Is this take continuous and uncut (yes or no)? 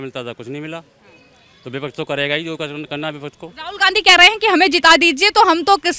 yes